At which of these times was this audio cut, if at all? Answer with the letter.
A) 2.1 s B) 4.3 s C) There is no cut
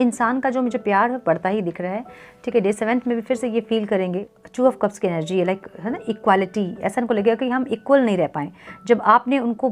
B